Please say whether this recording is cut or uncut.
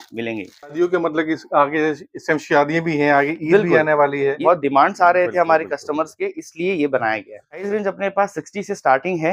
cut